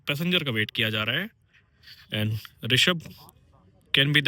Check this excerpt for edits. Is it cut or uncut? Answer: uncut